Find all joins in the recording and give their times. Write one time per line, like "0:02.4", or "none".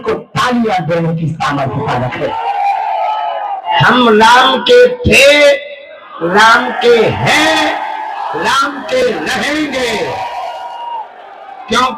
0:03.7